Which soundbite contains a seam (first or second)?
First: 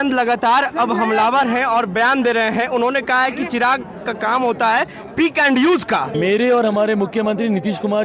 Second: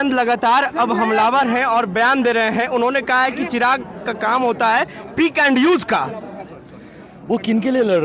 first